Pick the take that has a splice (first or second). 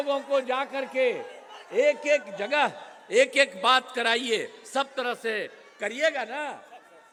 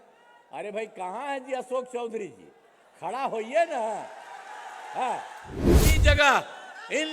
second